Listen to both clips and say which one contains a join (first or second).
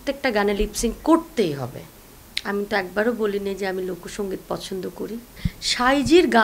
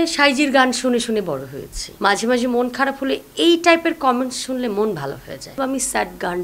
second